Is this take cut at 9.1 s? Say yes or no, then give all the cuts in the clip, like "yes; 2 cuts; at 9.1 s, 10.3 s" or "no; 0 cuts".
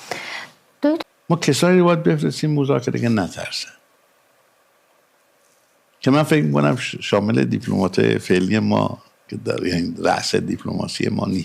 no; 1 cut; at 0.9 s